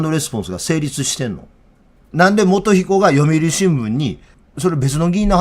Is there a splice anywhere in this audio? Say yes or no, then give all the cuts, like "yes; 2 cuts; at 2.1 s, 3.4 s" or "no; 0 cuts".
yes; 1 cut; at 2.0 s